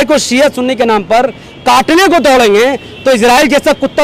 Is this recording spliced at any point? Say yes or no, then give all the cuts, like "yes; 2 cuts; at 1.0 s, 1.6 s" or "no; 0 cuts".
no; 0 cuts